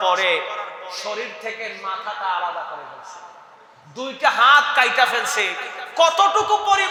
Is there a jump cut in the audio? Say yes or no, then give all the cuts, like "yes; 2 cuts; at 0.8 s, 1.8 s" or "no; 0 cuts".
no; 0 cuts